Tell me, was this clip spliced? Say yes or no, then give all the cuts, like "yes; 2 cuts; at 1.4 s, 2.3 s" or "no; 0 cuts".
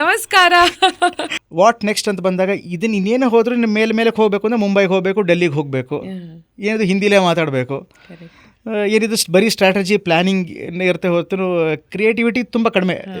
yes; 1 cut; at 1.3 s